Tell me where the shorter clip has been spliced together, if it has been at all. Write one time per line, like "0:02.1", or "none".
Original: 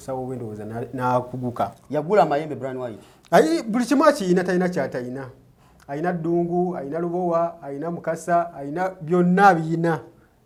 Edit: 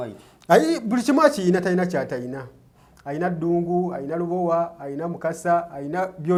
none